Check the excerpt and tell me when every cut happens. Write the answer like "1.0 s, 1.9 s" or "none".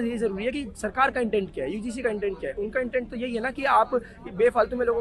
none